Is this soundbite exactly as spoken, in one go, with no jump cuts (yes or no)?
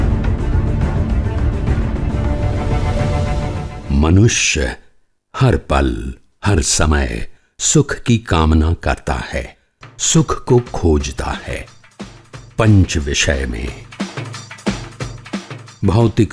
yes